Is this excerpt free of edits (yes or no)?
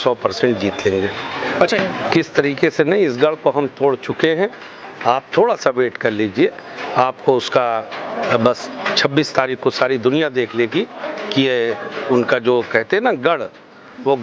no